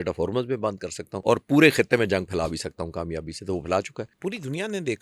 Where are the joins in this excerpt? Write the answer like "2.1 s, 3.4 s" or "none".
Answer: 1.1 s, 4.0 s